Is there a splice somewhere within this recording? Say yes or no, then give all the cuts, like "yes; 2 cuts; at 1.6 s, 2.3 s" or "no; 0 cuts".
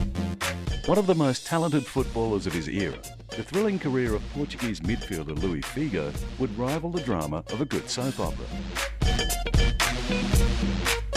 yes; 1 cut; at 3.4 s